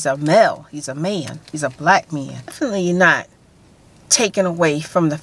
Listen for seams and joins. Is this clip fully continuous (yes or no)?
no